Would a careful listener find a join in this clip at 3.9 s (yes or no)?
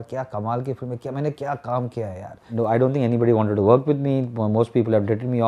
no